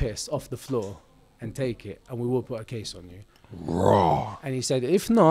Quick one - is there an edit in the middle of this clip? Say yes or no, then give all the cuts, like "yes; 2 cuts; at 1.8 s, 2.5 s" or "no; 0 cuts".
no; 0 cuts